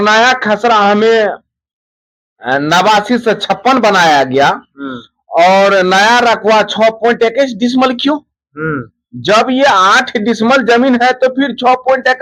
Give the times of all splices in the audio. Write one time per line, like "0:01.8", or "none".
none